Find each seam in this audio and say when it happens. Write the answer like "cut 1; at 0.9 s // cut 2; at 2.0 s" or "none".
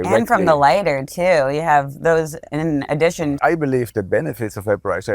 cut 1; at 3.4 s